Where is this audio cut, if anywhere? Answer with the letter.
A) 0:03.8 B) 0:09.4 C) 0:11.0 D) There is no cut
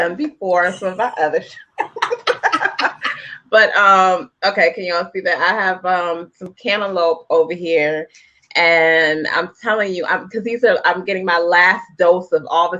A